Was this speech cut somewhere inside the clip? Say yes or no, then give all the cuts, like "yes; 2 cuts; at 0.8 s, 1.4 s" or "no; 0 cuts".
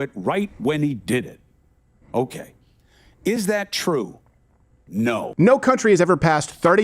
yes; 1 cut; at 5.2 s